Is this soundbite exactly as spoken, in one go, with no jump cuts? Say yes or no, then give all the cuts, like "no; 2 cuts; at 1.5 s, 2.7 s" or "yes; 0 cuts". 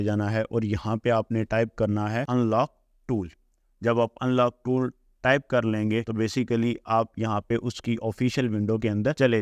yes; 0 cuts